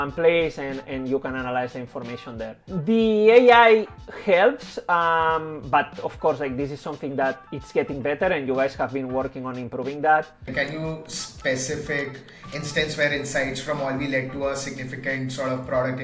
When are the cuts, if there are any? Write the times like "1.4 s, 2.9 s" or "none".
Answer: none